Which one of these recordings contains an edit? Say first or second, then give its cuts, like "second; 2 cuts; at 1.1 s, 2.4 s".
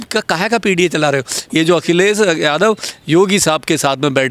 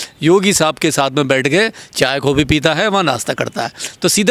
first; 1 cut; at 1.4 s